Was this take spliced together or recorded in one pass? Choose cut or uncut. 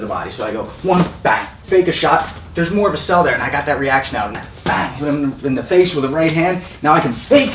cut